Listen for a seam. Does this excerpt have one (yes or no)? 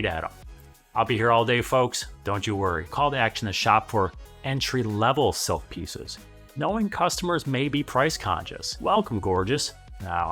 yes